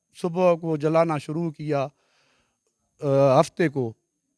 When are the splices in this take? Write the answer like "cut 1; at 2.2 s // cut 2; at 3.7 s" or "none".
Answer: none